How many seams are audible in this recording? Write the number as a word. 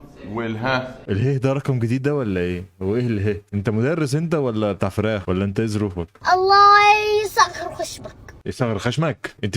one